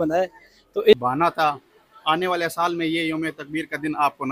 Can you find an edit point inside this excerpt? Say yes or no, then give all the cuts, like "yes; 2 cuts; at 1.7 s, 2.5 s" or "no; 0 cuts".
yes; 1 cut; at 0.9 s